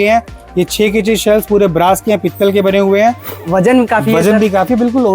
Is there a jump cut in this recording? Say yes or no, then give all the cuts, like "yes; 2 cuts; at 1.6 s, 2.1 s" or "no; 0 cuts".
yes; 1 cut; at 3.4 s